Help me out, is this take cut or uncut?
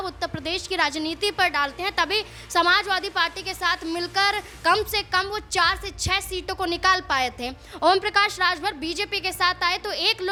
uncut